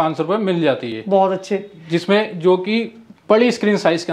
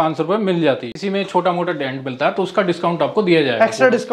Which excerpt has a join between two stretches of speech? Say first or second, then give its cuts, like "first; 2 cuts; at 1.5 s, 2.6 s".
second; 1 cut; at 0.9 s